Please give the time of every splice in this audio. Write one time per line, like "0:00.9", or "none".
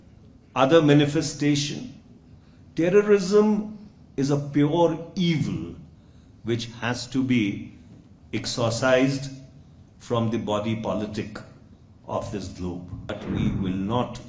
0:13.1